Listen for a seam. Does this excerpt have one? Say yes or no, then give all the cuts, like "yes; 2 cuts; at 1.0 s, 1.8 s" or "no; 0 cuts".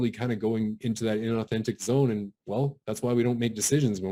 no; 0 cuts